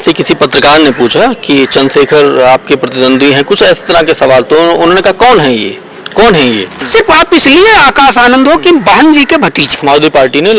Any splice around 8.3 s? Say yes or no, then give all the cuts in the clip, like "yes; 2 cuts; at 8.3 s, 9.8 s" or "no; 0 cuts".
no; 2 cuts; at 6.7 s, 9.8 s